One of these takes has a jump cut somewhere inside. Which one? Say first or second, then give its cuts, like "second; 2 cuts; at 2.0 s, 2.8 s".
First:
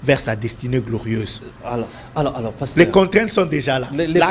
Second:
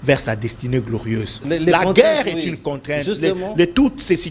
second; 1 cut; at 1.4 s